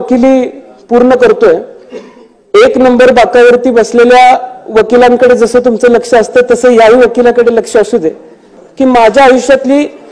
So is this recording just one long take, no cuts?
no; 1 cut; at 8.6 s

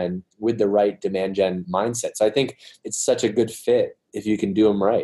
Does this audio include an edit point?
yes; 2 cuts; at 1.6 s, 2.8 s

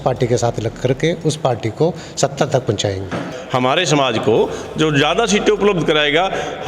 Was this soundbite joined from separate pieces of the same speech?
yes; 1 cut; at 3.3 s

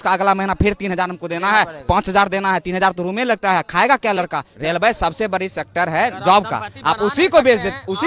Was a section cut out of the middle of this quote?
yes; 1 cut; at 4.2 s

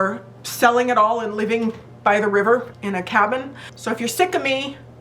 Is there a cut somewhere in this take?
yes; 1 cut; at 3.6 s

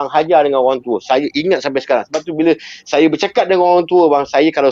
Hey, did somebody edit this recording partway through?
no; 0 cuts

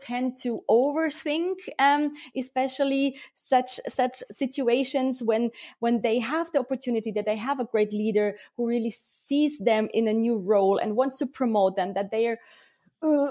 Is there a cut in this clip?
no; 0 cuts

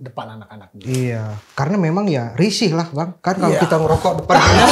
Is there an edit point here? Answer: yes; 1 cut; at 3.1 s

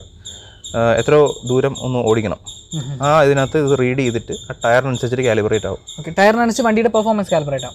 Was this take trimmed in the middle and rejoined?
no; 0 cuts

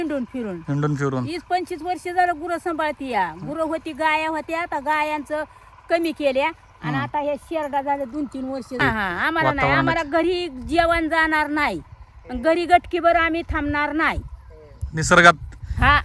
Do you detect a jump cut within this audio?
yes; 1 cut; at 8.8 s

